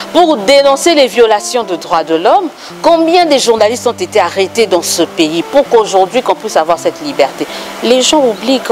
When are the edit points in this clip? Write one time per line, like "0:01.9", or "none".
none

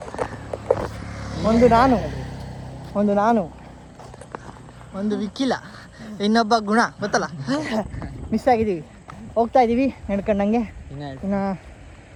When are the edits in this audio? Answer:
none

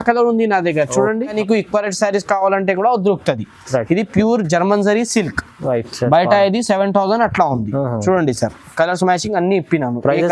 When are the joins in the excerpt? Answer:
0:01.4

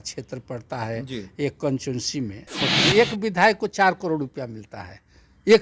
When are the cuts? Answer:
0:02.7

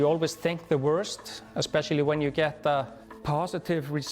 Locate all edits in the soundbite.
0:03.0

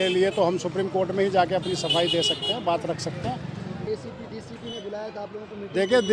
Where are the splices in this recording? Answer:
0:03.8

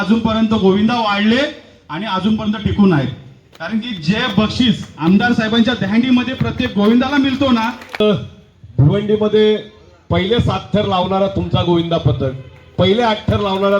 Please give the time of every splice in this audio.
0:08.0

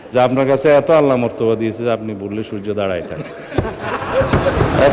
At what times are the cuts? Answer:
none

